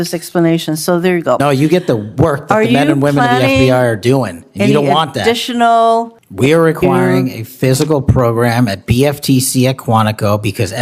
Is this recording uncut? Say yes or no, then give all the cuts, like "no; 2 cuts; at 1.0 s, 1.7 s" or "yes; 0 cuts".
no; 1 cut; at 6.2 s